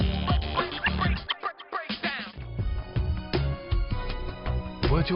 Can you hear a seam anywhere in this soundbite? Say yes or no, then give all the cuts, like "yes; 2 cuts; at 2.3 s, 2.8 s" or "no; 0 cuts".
yes; 1 cut; at 2.4 s